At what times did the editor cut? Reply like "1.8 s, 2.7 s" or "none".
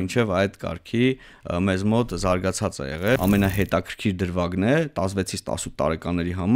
3.2 s